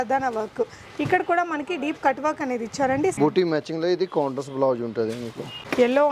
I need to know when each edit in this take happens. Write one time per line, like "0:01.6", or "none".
0:03.2